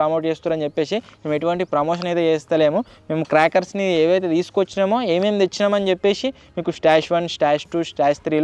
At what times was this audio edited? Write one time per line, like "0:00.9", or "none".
none